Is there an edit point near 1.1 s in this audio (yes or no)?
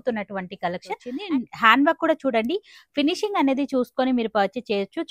yes